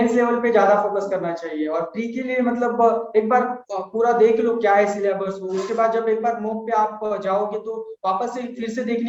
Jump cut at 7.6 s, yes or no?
no